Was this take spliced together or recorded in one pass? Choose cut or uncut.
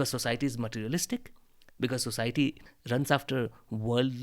cut